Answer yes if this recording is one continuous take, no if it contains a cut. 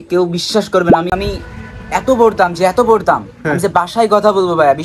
no